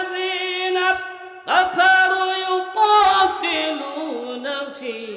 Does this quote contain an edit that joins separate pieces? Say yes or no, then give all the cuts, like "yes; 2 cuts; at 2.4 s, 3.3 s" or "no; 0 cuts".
no; 0 cuts